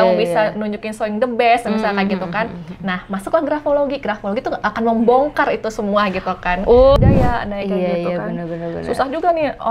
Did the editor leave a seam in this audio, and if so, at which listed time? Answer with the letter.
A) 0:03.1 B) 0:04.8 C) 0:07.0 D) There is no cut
C